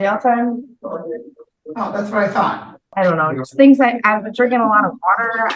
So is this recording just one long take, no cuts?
no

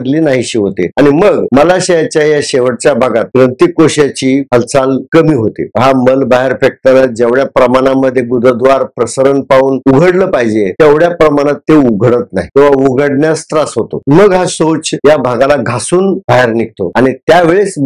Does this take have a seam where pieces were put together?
yes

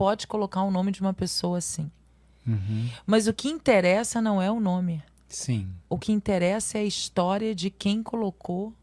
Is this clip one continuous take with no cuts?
yes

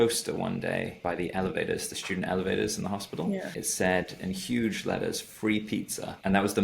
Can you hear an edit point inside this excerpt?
yes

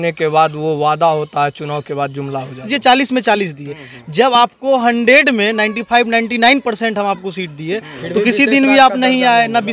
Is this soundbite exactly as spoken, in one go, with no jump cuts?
no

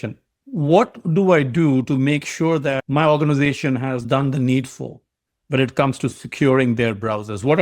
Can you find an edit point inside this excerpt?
yes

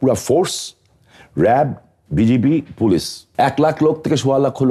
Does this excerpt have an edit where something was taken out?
yes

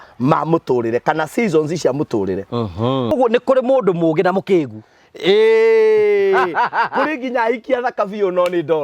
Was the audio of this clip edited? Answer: yes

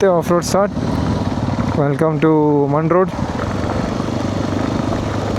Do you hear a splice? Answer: yes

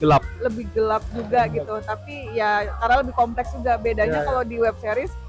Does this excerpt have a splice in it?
no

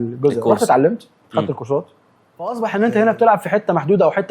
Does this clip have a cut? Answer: yes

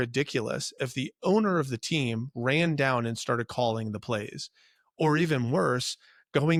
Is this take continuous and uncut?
yes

